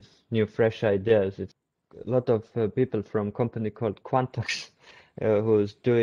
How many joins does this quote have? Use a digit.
1